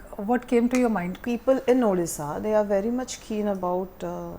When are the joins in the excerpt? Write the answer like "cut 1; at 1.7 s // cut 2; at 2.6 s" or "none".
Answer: cut 1; at 1.2 s